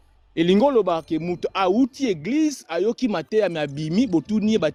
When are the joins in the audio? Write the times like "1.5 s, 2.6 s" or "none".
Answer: none